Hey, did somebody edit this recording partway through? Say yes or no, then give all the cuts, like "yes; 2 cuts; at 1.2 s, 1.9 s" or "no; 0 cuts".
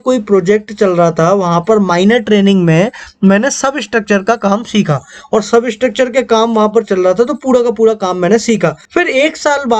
yes; 1 cut; at 8.8 s